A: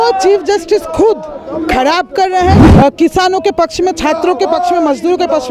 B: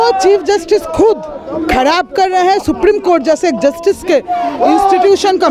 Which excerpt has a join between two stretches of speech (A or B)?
A